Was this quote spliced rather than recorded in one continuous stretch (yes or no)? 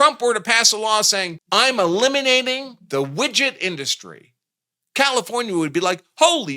yes